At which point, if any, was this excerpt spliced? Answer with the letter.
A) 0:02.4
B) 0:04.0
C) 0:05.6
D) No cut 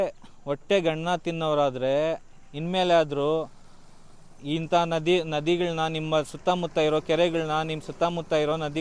D